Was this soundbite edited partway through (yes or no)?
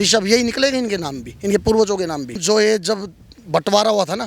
yes